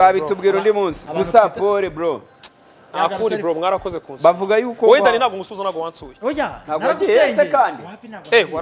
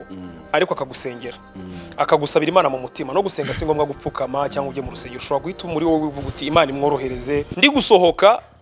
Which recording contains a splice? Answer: second; 1 cut; at 7.5 s

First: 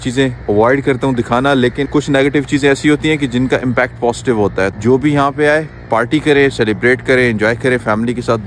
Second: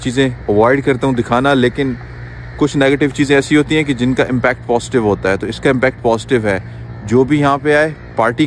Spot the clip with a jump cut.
first; 2 cuts; at 1.8 s, 4.7 s

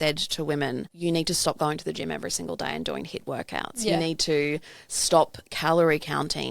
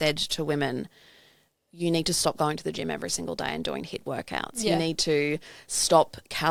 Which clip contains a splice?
first; 1 cut; at 0.9 s

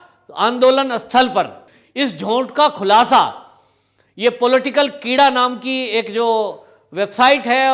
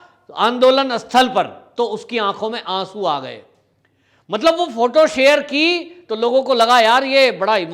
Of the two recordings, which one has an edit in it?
first; 1 cut; at 1.6 s

